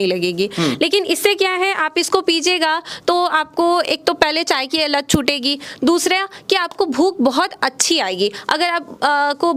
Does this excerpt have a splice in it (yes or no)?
no